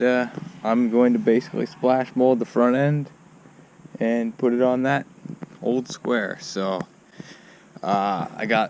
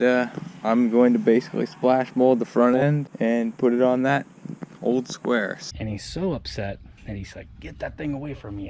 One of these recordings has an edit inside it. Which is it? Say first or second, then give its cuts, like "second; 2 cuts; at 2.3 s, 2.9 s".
second; 2 cuts; at 3.1 s, 5.6 s